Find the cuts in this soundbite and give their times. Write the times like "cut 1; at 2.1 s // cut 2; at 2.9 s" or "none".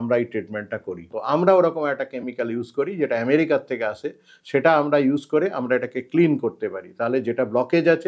cut 1; at 1.1 s